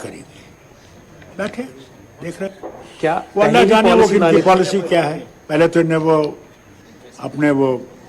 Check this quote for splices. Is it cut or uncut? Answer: cut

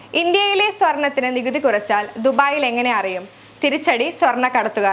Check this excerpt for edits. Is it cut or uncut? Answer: uncut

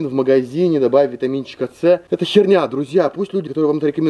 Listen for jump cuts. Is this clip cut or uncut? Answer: uncut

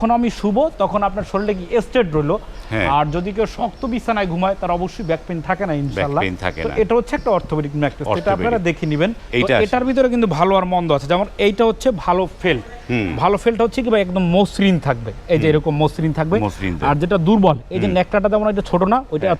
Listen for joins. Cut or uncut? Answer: cut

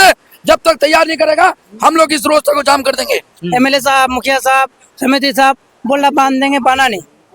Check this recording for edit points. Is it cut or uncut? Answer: cut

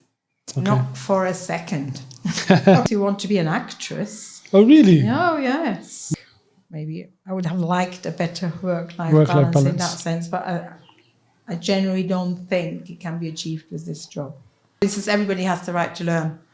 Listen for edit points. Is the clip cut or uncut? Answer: cut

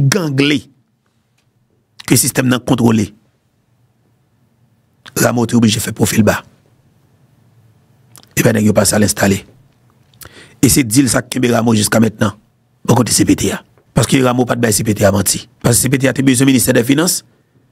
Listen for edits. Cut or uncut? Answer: cut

